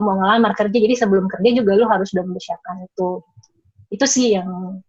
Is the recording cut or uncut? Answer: uncut